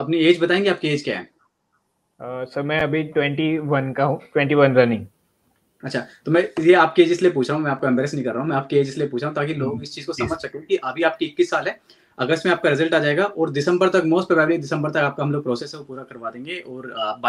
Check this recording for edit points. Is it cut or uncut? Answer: uncut